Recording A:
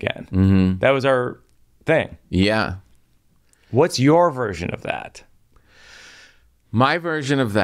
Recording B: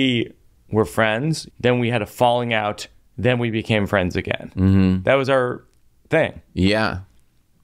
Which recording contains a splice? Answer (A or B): B